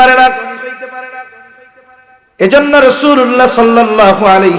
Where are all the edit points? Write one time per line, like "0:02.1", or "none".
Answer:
none